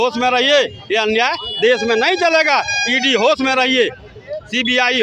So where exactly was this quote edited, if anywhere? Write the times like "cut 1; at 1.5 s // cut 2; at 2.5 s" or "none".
none

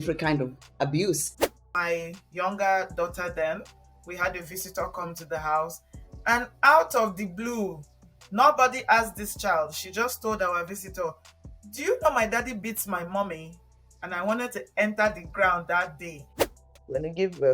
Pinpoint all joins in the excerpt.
cut 1; at 1.3 s // cut 2; at 16.4 s

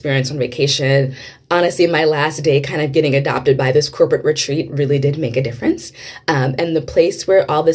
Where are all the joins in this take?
none

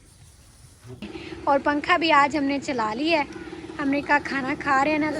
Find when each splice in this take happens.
cut 1; at 1.0 s

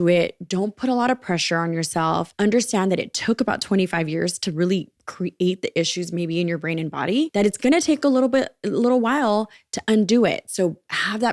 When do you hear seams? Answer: cut 1; at 2.3 s // cut 2; at 7.3 s

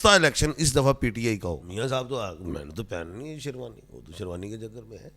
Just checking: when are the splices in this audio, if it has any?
cut 1; at 1.7 s

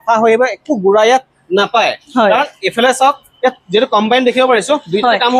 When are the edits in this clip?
none

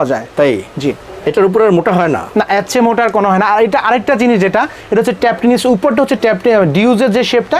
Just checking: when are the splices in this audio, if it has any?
none

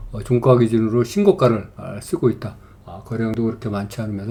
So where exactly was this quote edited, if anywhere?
none

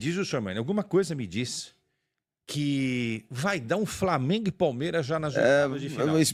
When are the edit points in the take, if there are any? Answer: none

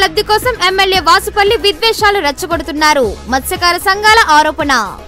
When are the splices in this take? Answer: none

